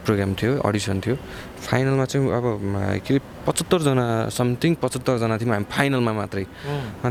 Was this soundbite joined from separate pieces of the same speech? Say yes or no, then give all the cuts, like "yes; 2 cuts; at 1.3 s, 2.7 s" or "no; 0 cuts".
no; 0 cuts